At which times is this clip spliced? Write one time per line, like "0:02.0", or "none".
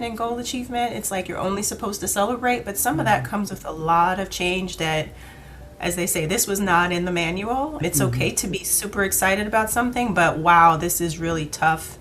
0:07.8